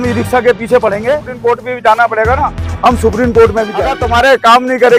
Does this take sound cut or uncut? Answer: cut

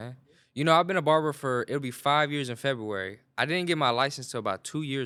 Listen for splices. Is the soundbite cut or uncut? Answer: uncut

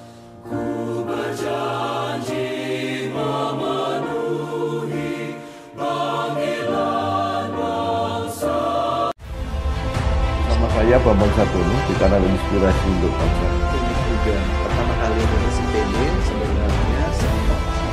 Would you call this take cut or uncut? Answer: cut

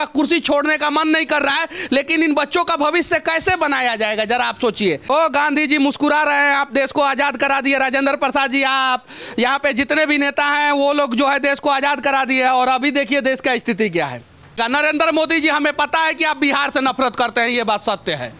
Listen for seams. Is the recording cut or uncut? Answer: cut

